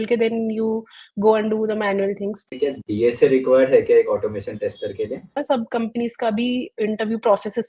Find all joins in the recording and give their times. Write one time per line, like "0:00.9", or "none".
0:02.5
0:05.4